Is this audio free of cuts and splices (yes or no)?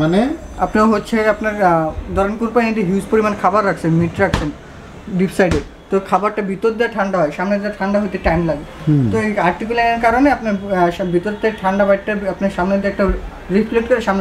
yes